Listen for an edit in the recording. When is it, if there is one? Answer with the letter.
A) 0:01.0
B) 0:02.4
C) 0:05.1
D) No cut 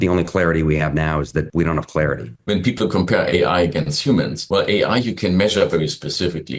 B